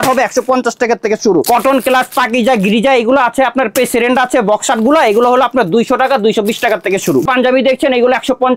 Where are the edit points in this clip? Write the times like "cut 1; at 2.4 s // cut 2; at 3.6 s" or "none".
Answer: cut 1; at 1.5 s // cut 2; at 7.2 s